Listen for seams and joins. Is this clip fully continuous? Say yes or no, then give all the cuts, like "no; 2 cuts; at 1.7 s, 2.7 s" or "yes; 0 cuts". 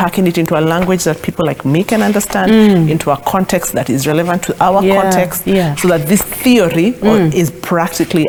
yes; 0 cuts